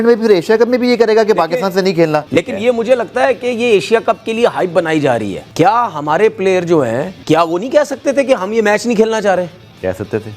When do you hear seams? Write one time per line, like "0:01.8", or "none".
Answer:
0:02.3
0:05.4
0:07.1